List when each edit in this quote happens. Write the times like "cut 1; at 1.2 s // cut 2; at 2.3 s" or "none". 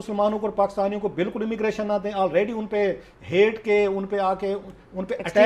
none